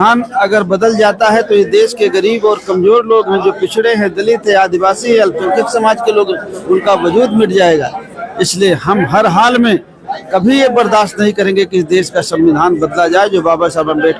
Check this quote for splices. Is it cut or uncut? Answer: uncut